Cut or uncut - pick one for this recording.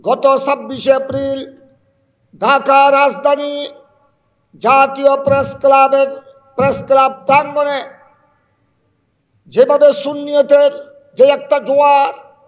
uncut